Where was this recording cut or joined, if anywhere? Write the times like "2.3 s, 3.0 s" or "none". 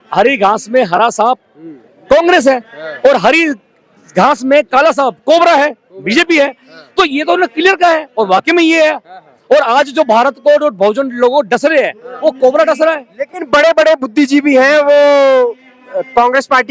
none